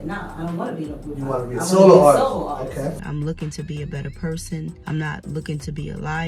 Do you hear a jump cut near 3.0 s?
yes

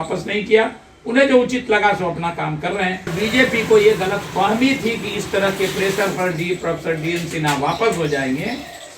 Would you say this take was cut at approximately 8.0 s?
no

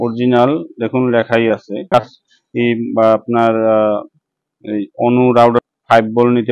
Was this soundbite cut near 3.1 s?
no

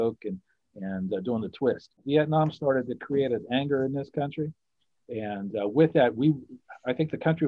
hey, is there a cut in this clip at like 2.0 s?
yes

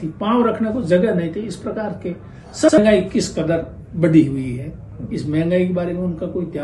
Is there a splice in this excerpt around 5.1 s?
no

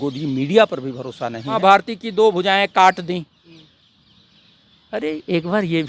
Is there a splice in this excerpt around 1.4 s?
yes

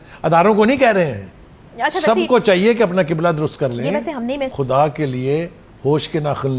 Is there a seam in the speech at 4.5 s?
yes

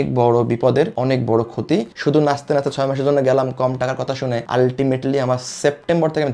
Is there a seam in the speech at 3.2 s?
no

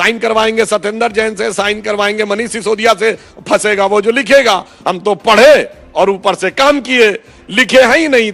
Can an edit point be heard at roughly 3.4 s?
no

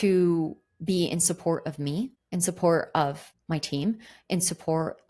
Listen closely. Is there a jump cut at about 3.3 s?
yes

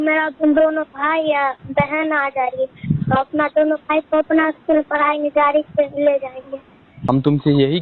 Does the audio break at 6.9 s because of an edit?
yes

